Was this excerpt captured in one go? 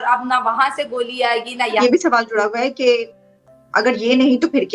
no; 1 cut; at 1.8 s

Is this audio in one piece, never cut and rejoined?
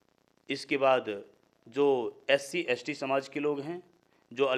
yes; 0 cuts

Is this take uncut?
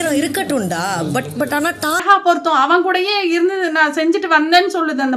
no; 1 cut; at 2.0 s

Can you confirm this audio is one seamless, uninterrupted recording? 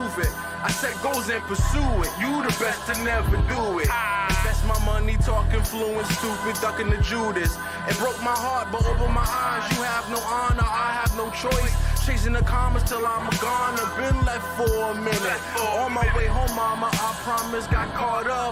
yes; 0 cuts

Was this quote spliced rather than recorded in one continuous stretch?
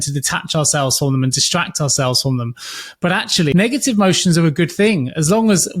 yes; 1 cut; at 3.5 s

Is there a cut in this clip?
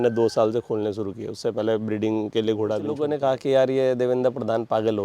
yes; 1 cut; at 2.9 s

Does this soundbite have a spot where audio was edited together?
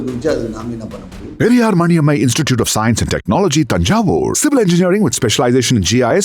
yes; 1 cut; at 1.2 s

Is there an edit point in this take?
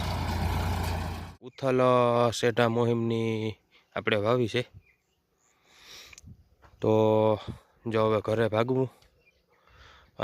yes; 1 cut; at 1.5 s

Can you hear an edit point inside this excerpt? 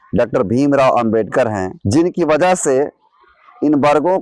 yes; 1 cut; at 1.7 s

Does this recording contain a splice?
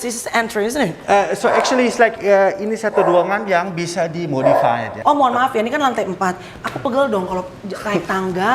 yes; 1 cut; at 4.9 s

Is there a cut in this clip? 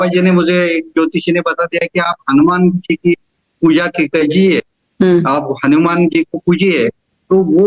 no; 0 cuts

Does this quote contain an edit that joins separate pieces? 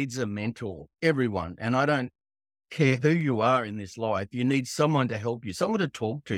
no; 0 cuts

